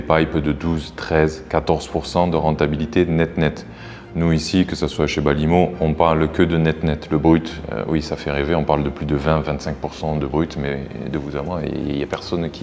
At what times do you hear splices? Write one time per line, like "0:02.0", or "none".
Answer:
none